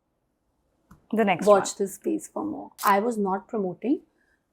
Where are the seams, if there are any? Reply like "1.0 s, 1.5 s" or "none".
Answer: 2.7 s